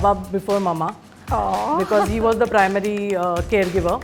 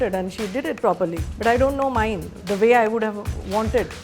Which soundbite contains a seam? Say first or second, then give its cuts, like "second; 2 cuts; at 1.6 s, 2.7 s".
second; 2 cuts; at 1.3 s, 2.4 s